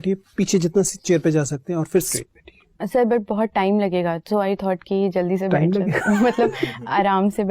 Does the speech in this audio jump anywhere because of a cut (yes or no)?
yes